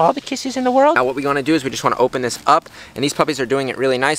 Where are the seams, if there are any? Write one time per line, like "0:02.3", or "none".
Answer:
0:01.0